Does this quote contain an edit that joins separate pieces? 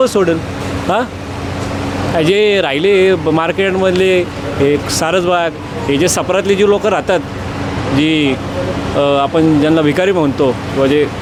no; 0 cuts

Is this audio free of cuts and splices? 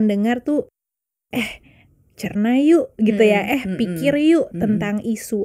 yes; 0 cuts

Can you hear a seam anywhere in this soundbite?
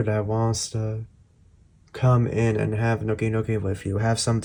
no; 0 cuts

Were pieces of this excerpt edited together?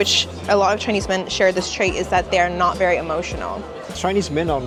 no; 0 cuts

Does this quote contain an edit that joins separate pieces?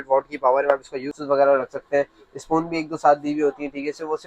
yes; 1 cut; at 1.2 s

